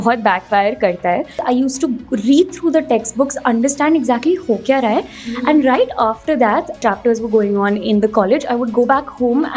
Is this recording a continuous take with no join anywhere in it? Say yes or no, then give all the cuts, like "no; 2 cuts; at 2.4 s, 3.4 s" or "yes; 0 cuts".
no; 2 cuts; at 1.4 s, 6.8 s